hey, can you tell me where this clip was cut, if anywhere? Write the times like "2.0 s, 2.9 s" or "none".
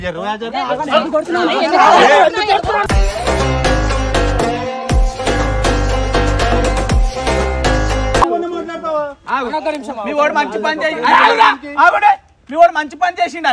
8.2 s